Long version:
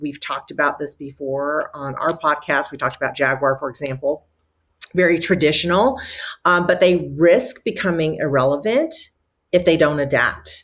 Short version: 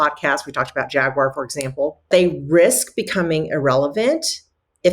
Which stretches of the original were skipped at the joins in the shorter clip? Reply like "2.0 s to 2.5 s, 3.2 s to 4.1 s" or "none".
4.3 s to 6.8 s

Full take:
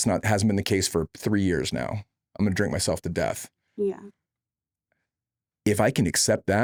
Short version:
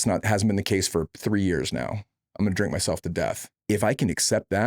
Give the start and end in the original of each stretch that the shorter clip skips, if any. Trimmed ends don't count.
3.5 s to 5.5 s

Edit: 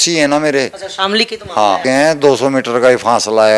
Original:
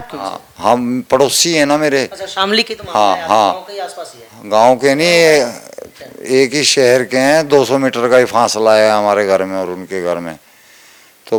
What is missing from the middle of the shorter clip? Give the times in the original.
3.2 s to 7.1 s

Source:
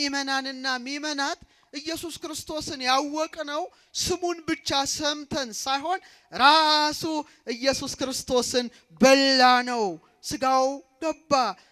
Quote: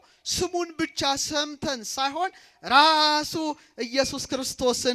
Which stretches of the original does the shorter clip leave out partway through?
none

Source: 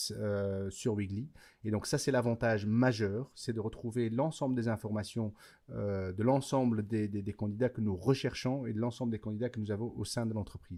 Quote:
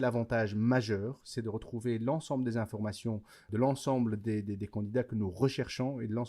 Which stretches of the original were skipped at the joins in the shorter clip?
5.5 s to 6.1 s

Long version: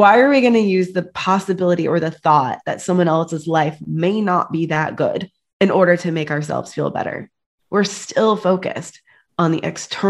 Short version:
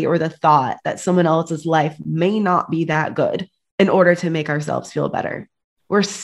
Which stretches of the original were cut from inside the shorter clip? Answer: none

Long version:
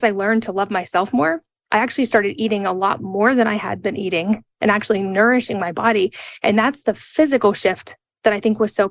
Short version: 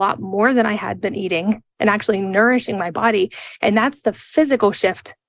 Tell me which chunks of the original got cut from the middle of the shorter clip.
none

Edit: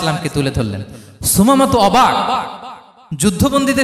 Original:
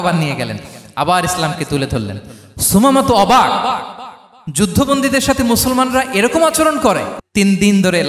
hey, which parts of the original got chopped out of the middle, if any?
none

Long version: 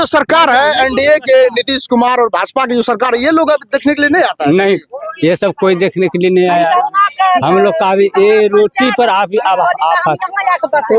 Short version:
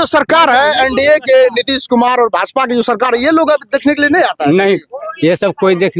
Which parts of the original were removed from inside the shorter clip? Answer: none

